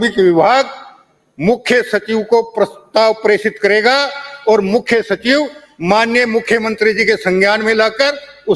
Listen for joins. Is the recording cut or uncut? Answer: uncut